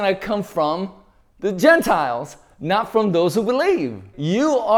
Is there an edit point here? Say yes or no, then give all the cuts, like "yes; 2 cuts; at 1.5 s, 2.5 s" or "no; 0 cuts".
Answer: no; 0 cuts